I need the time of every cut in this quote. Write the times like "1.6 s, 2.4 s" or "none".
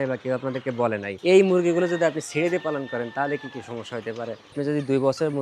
1.1 s, 4.5 s